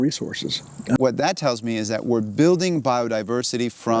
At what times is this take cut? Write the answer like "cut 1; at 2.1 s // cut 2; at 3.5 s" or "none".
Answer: cut 1; at 1.0 s